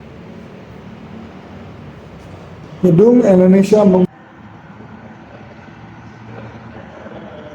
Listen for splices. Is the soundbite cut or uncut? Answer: cut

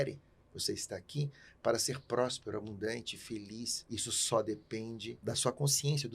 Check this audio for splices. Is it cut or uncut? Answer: cut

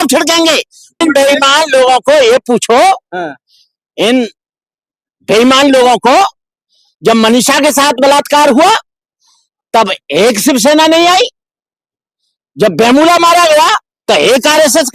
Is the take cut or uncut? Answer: cut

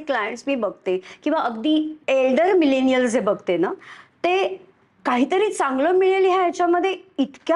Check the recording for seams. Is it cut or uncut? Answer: cut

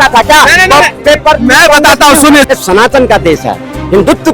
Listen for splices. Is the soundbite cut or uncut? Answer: cut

